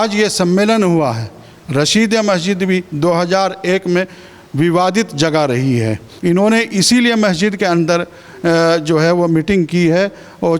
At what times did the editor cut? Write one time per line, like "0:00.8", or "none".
0:06.1

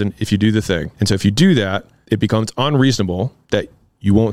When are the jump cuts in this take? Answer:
0:00.9
0:01.9
0:03.4

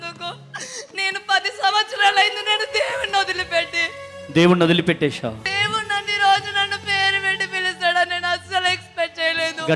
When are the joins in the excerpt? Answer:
0:05.5

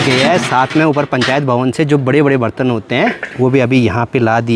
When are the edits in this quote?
none

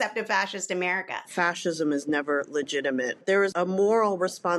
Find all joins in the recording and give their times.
0:01.3
0:03.4

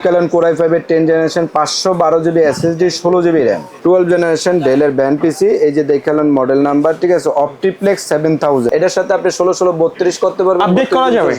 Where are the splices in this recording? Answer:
0:03.7
0:08.7

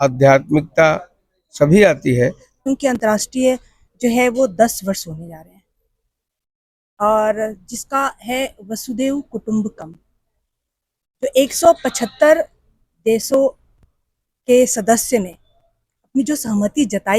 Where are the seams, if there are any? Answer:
0:02.6

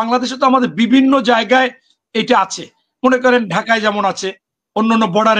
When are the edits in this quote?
none

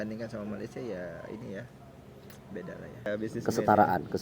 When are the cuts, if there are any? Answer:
0:03.0

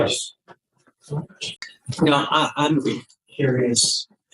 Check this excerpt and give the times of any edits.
0:01.5

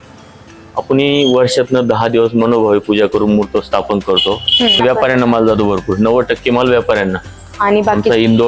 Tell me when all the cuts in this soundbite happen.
0:04.8

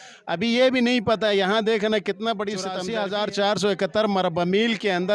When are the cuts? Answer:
0:02.8

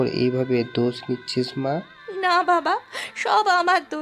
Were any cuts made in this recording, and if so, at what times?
0:02.0

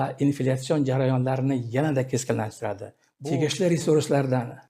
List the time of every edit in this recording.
0:03.0

